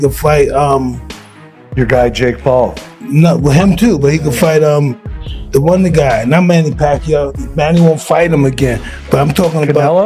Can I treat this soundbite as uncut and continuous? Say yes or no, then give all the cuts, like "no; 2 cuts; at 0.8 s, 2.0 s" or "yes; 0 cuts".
yes; 0 cuts